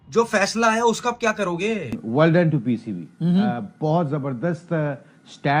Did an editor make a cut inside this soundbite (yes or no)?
yes